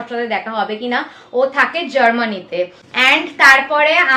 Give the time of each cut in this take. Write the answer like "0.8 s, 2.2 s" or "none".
3.1 s